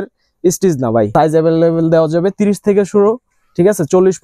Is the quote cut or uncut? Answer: cut